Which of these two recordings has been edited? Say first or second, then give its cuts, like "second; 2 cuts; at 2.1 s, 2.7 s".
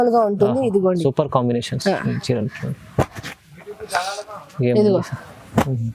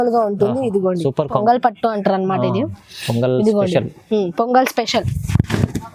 second; 1 cut; at 1.4 s